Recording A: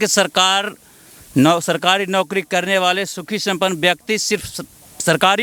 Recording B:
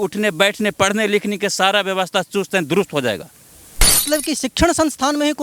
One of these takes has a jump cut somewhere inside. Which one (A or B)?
B